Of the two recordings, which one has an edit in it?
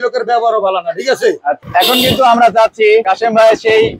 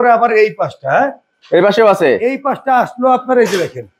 first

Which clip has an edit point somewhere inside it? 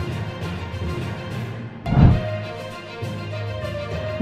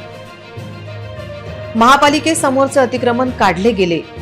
first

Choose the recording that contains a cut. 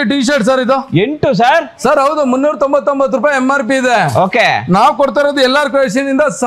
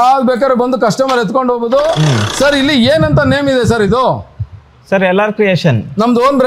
second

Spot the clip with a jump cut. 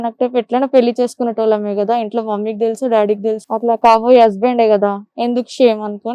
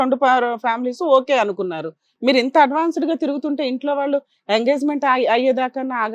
first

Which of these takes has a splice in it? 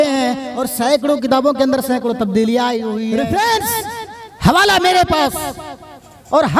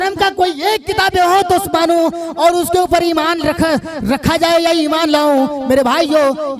first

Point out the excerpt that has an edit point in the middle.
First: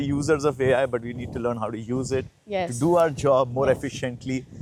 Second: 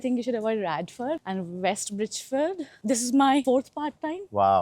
second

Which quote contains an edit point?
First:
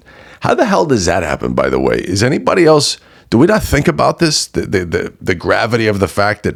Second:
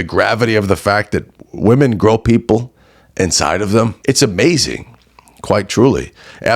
second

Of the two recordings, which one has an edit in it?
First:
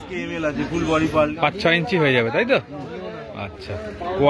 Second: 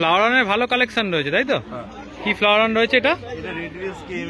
first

